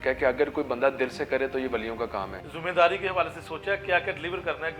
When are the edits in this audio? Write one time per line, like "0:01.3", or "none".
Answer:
0:02.7